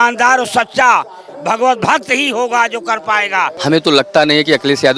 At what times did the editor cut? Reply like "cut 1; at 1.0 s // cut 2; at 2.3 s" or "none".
cut 1; at 3.5 s